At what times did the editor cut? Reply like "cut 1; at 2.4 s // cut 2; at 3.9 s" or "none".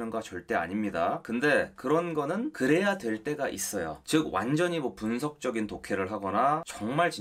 cut 1; at 1.2 s // cut 2; at 2.5 s